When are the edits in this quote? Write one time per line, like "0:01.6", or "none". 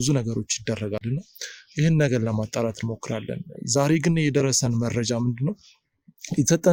none

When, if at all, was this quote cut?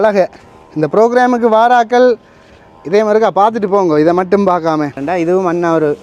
0:05.0

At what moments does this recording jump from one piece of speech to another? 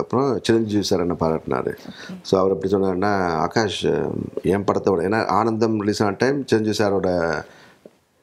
none

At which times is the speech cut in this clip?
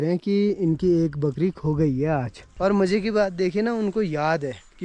0:02.5

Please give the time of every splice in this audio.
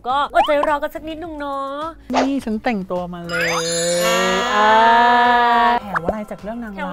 0:02.1
0:05.8

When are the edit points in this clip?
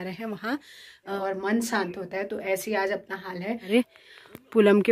0:01.2
0:03.7

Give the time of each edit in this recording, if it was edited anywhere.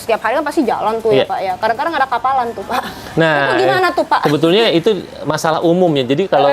none

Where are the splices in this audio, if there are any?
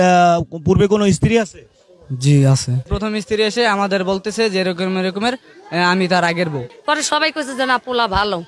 0:02.8
0:06.7

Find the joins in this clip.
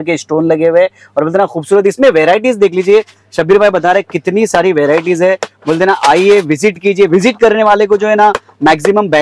none

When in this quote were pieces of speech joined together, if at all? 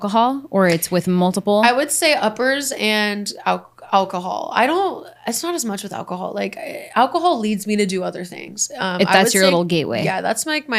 none

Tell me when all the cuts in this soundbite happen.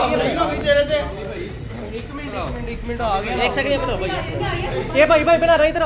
none

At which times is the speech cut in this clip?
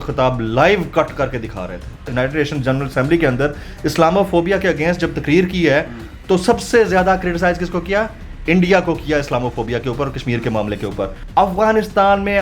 0:02.0
0:11.1

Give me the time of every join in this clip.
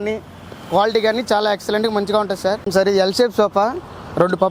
0:02.6

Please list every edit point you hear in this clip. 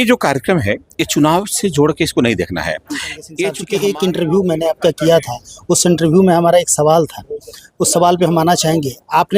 0:03.6

